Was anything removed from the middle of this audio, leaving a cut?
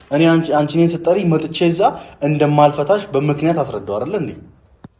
no; 0 cuts

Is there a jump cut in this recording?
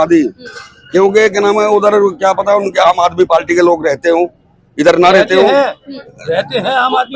no; 0 cuts

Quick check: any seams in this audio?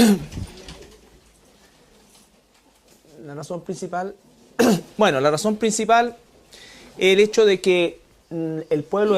yes; 1 cut; at 5.0 s

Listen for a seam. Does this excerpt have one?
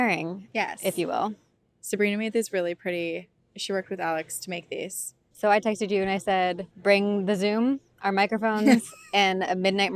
no; 0 cuts

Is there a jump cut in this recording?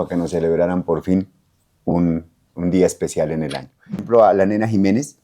yes; 1 cut; at 4.0 s

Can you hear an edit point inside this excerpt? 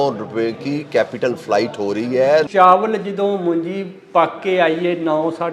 yes; 1 cut; at 2.5 s

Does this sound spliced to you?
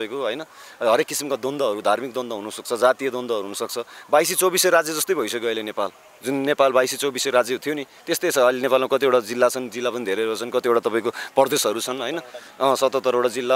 yes; 1 cut; at 6.1 s

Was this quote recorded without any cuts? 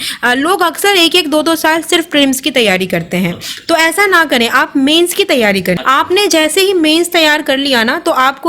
no; 1 cut; at 5.8 s

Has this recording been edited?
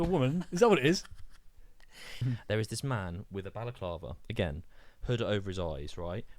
yes; 1 cut; at 2.2 s

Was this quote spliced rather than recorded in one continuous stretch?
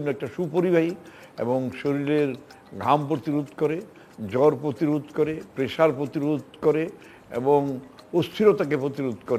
no; 0 cuts

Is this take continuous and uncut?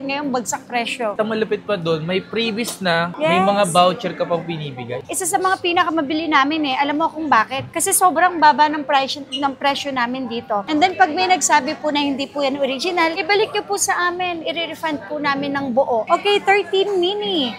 no; 4 cuts; at 1.1 s, 4.9 s, 10.6 s, 16.1 s

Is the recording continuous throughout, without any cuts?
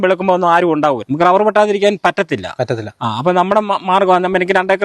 no; 1 cut; at 1.0 s

